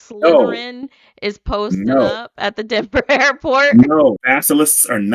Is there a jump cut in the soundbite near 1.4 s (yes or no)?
no